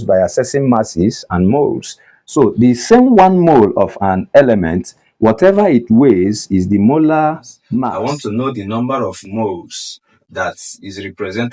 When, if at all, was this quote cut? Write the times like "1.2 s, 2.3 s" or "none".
7.9 s